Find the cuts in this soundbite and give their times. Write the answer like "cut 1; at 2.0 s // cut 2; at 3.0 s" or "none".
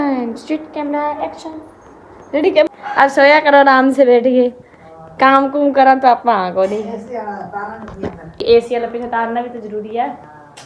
cut 1; at 2.7 s // cut 2; at 8.4 s